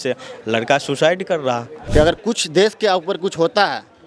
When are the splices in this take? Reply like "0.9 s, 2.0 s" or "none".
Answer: 1.7 s